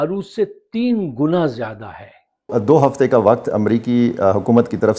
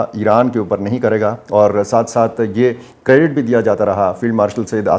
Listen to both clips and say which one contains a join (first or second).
first